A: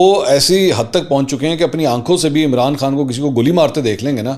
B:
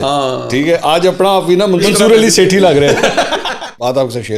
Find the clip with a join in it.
B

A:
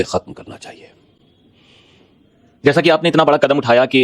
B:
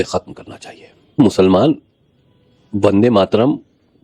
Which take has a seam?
B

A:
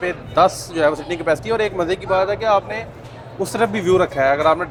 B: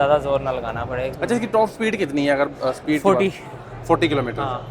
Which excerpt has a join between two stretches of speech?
B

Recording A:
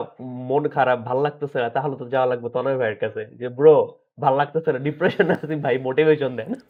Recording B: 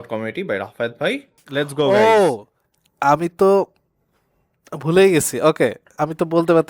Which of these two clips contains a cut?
B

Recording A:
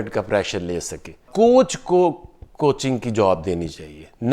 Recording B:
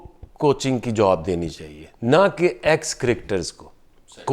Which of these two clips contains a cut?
A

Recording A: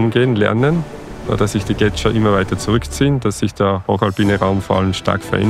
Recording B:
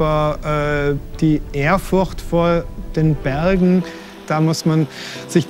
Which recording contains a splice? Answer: B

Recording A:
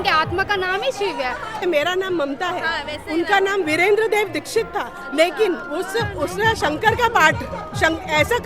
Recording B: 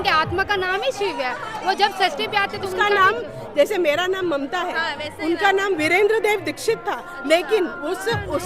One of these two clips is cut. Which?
A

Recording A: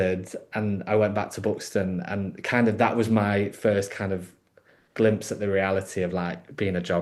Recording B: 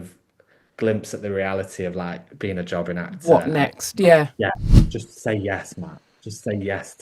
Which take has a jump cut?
B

